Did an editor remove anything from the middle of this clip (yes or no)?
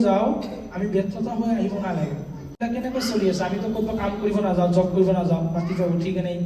yes